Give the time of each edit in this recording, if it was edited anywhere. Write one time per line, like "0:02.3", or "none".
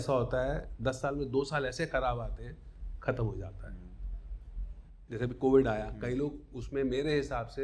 none